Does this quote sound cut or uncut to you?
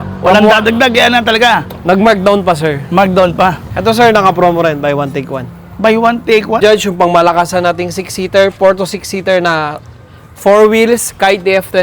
cut